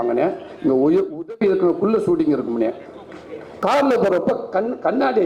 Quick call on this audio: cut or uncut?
cut